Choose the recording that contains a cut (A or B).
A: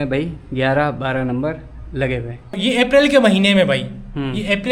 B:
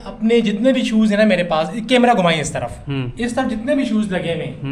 A